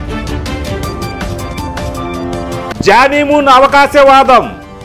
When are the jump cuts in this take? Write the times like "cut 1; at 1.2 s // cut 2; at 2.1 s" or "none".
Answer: cut 1; at 2.7 s